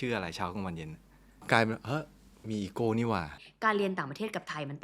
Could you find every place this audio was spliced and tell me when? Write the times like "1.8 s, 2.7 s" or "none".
3.4 s